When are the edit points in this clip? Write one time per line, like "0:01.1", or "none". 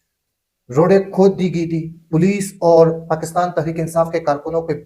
none